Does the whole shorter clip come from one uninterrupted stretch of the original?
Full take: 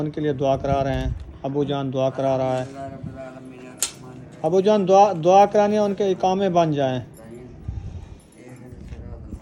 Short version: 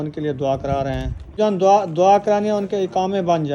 no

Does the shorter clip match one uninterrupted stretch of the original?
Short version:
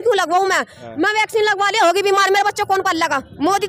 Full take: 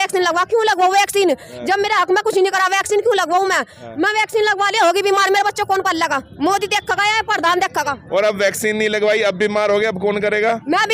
yes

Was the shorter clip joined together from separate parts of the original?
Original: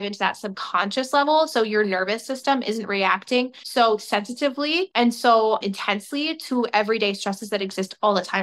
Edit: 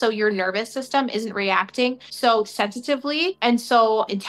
no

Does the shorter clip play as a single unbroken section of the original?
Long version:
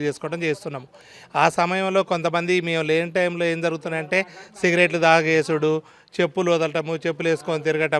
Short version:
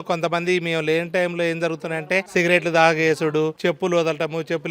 no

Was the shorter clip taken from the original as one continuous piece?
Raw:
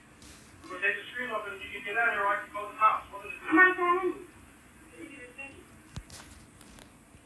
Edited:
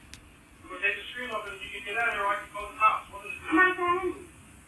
yes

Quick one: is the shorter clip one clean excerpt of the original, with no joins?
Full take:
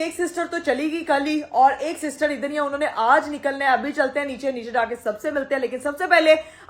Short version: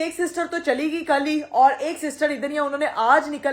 yes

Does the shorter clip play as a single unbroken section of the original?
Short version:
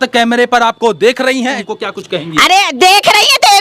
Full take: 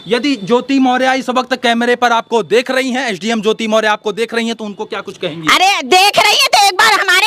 no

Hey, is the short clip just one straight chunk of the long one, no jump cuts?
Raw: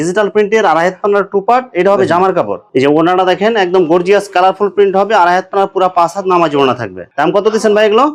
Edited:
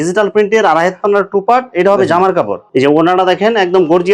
yes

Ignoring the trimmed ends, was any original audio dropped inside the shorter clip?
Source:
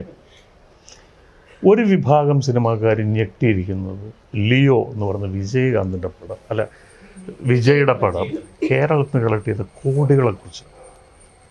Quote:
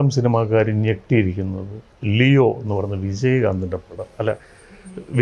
no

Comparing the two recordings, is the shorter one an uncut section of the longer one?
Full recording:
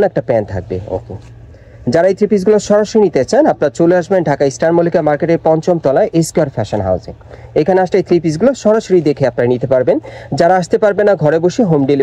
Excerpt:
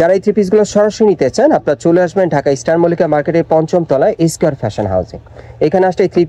yes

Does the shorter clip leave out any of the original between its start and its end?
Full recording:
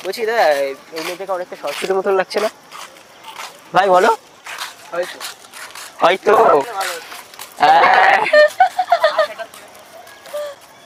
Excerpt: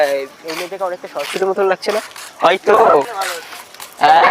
yes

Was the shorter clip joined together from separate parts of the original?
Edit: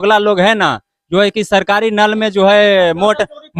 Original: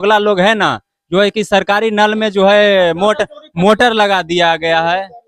no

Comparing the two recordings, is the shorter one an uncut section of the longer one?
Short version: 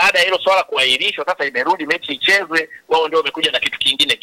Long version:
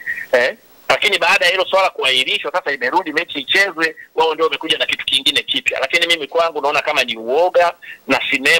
yes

